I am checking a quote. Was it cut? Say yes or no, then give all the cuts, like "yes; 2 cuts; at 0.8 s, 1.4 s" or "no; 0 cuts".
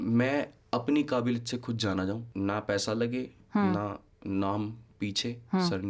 yes; 1 cut; at 2.2 s